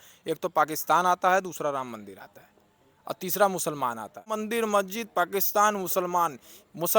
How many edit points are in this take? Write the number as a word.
one